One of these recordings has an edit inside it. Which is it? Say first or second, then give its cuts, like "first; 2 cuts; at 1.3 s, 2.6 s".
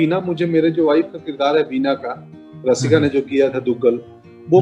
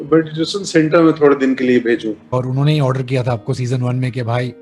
second; 1 cut; at 2.3 s